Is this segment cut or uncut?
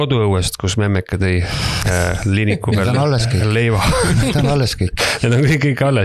uncut